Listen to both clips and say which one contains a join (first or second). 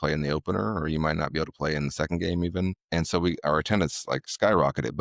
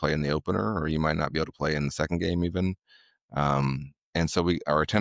first